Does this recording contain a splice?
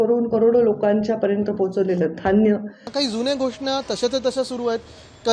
yes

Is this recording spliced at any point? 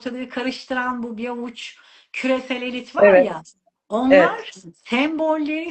no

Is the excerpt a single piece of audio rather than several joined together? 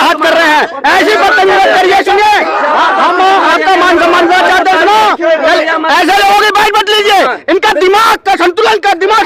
yes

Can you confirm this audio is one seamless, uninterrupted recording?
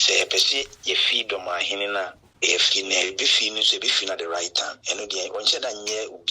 no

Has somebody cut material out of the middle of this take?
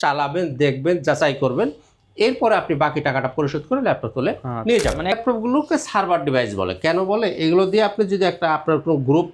yes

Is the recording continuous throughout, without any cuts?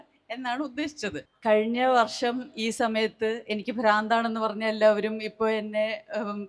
no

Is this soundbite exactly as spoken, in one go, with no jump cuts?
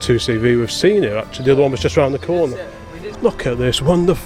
no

